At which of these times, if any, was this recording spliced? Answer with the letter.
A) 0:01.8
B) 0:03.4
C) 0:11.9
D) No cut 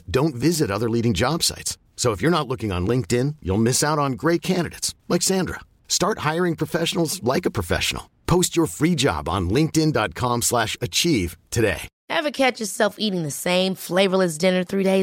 C